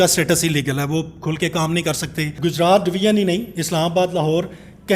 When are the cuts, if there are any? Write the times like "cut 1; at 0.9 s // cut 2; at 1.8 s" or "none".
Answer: cut 1; at 2.3 s